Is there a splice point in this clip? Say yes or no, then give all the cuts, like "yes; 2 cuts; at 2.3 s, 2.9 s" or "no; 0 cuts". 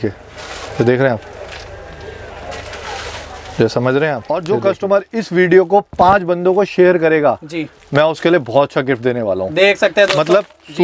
yes; 1 cut; at 4.2 s